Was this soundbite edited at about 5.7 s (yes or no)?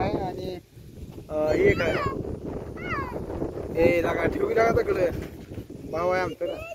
yes